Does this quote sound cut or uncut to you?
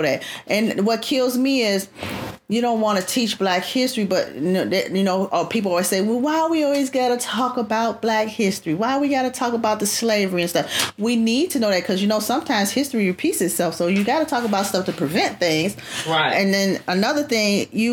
uncut